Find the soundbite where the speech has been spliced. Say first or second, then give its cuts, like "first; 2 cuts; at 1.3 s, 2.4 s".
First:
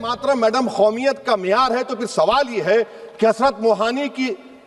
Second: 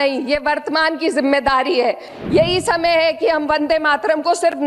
second; 1 cut; at 2.1 s